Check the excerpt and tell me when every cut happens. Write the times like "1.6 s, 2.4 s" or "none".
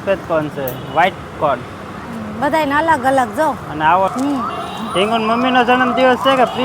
4.1 s